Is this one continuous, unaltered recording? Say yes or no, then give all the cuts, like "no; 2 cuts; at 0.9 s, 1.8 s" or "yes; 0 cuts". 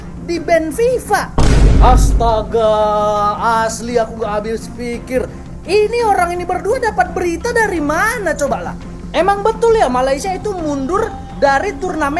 yes; 0 cuts